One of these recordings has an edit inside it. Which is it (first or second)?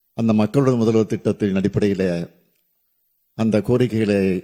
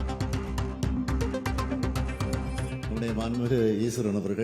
second